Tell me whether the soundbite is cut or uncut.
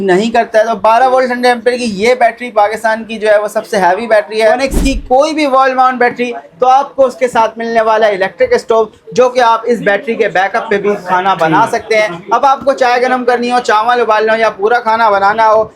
cut